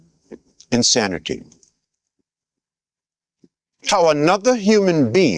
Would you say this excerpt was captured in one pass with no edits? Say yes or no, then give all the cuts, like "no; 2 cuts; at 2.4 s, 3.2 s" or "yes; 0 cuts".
yes; 0 cuts